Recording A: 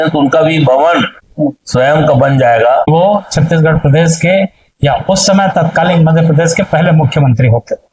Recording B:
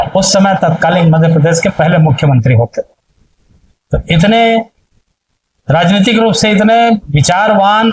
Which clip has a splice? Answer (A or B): A